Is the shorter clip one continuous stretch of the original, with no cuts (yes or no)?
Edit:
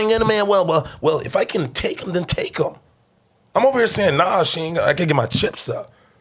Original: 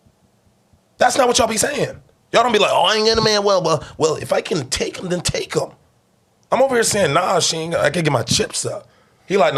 yes